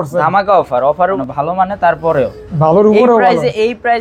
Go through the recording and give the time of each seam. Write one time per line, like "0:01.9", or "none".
0:01.2